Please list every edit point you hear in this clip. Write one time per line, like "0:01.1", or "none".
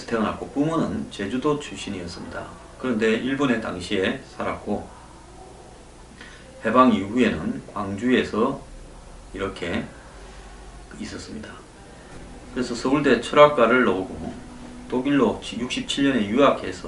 0:08.6